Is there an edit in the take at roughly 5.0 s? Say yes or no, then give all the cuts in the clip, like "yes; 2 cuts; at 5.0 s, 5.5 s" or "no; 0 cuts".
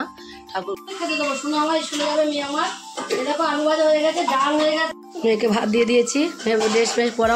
yes; 2 cuts; at 0.8 s, 5.0 s